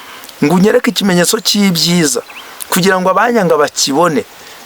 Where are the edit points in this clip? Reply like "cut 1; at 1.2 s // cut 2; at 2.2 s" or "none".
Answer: none